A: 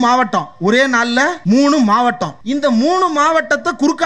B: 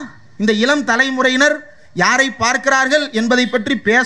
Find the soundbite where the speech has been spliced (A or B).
A